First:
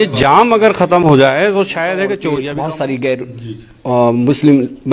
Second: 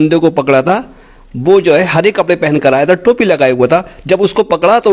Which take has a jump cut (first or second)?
first